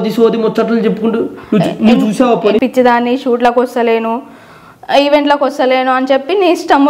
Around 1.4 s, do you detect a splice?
no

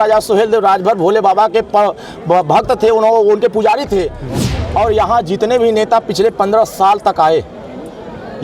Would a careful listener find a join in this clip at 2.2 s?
no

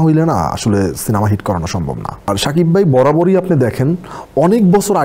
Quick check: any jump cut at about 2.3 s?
yes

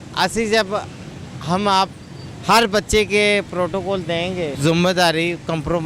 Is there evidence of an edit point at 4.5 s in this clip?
yes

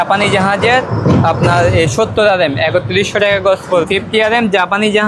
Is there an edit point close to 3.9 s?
yes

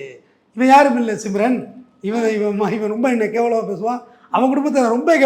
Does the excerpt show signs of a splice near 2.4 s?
no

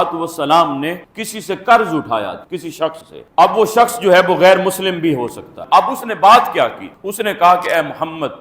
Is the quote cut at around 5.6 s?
yes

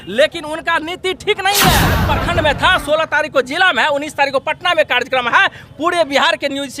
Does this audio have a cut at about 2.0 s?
yes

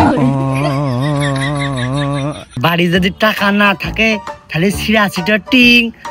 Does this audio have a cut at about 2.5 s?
yes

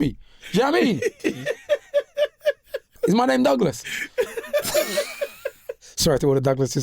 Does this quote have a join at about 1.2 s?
yes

